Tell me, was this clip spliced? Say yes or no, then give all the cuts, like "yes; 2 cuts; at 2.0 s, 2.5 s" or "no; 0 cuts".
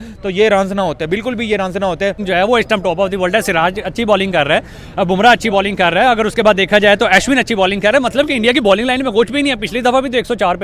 yes; 1 cut; at 2.2 s